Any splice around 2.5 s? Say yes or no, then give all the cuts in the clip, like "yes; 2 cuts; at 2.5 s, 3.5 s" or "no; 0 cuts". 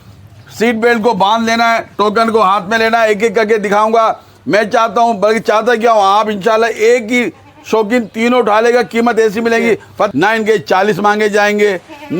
no; 1 cut; at 10.1 s